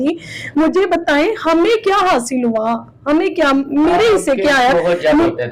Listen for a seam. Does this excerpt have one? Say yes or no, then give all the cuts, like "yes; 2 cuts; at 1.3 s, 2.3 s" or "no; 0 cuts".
no; 0 cuts